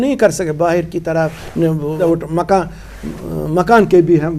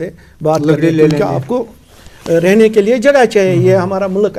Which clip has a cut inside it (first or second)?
first